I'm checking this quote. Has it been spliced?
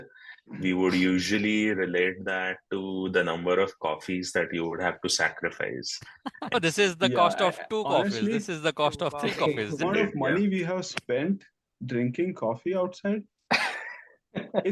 yes; 2 cuts; at 6.5 s, 9.8 s

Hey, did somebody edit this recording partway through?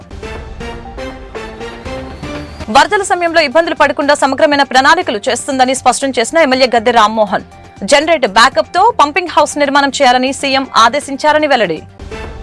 no; 0 cuts

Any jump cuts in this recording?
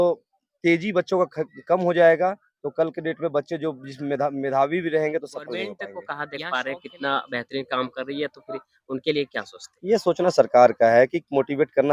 yes; 1 cut; at 6.0 s

